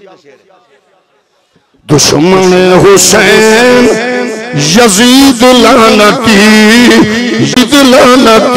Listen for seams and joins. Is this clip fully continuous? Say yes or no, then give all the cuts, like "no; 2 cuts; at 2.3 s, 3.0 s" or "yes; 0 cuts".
no; 1 cut; at 7.6 s